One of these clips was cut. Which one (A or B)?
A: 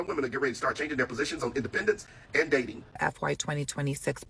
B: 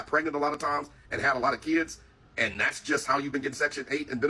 A